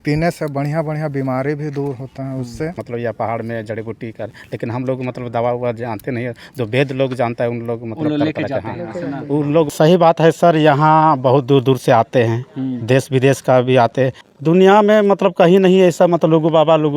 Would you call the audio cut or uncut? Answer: cut